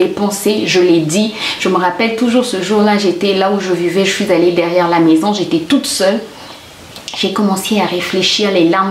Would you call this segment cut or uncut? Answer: uncut